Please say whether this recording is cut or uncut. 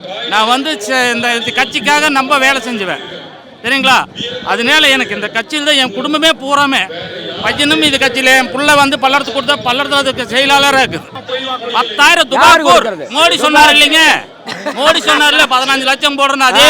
cut